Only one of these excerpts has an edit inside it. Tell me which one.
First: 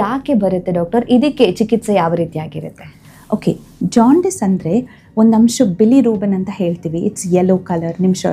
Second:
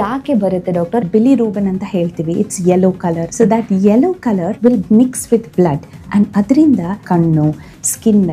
second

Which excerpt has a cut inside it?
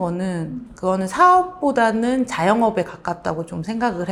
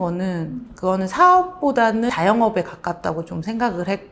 second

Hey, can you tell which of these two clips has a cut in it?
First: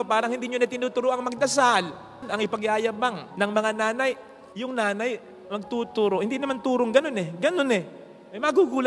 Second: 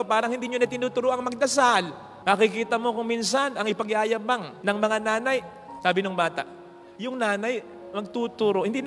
first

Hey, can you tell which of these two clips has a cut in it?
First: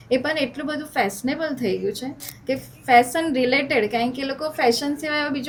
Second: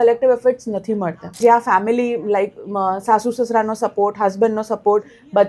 second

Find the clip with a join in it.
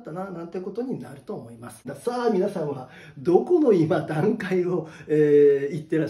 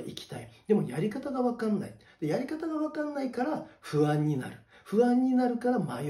first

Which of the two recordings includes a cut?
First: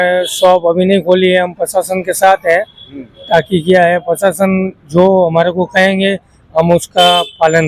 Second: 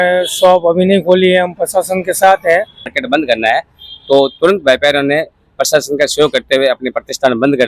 second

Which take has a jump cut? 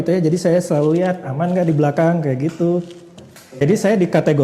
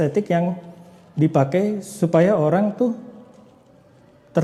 first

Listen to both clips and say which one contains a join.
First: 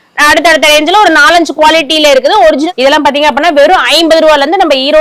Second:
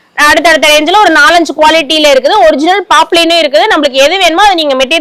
first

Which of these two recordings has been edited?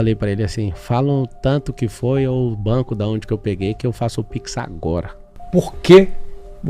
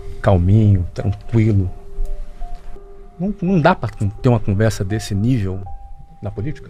first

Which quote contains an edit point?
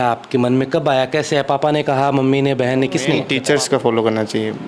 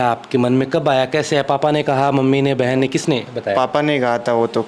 first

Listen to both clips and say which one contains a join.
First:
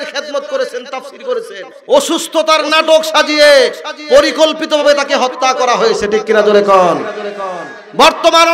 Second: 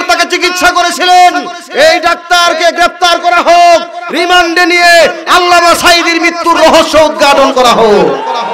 first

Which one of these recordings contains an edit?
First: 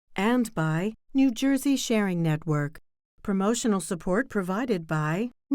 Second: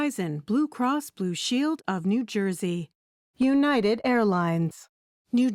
first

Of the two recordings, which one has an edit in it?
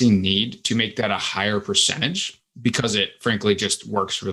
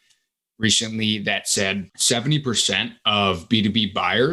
second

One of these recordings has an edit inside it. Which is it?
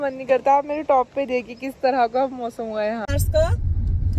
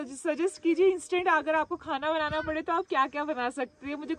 first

